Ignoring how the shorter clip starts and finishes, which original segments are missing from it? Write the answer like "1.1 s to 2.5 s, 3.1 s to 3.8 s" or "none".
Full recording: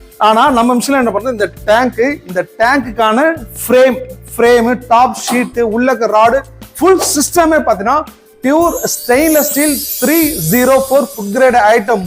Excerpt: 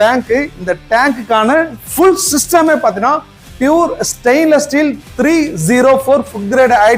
3.5 s to 6.6 s

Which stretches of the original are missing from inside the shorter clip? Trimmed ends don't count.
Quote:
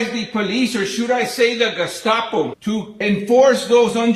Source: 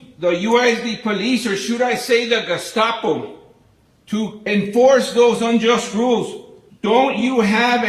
3.3 s to 4.0 s

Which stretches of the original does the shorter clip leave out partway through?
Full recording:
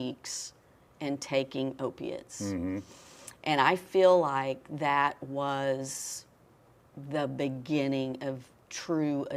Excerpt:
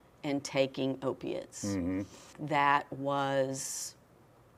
3.1 s to 4.6 s

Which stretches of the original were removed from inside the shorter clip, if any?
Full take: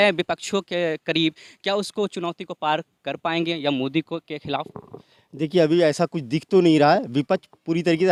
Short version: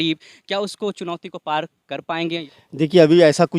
3.6 s to 5.0 s

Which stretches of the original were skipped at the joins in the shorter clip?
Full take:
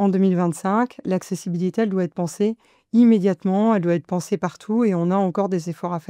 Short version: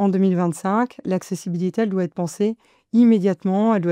none

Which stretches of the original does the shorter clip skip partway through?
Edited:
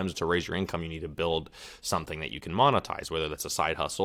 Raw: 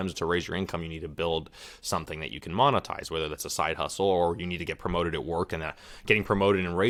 none

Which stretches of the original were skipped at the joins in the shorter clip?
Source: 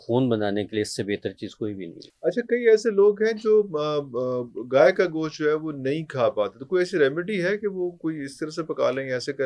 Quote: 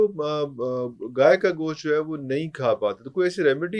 none

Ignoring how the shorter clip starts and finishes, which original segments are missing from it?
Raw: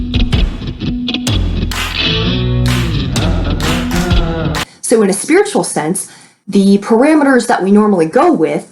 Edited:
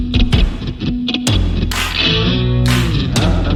none

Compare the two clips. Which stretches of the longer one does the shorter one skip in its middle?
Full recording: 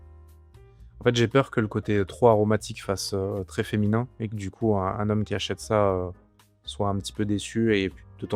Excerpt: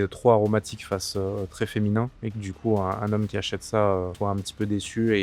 6.1 s to 6.7 s

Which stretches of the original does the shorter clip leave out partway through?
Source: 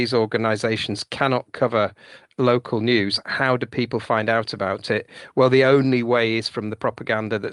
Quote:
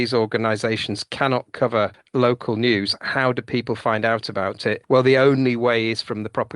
2.0 s to 2.2 s, 5.0 s to 5.3 s

